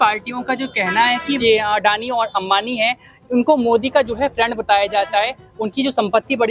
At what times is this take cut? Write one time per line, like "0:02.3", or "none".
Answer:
0:01.4